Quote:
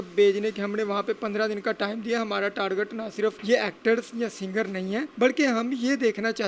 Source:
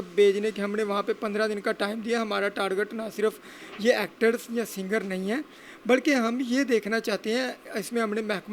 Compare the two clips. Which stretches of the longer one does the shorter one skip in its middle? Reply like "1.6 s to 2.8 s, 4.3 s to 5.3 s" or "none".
3.4 s to 3.7 s, 5.5 s to 5.8 s